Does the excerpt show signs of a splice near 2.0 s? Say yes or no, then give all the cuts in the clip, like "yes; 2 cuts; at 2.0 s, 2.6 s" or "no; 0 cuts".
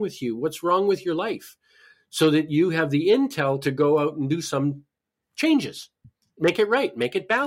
no; 1 cut; at 6.2 s